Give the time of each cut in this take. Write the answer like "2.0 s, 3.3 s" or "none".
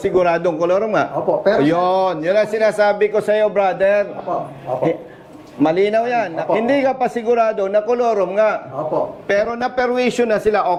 none

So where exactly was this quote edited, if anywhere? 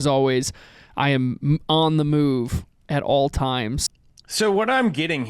3.8 s

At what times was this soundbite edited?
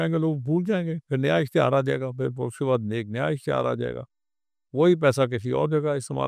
none

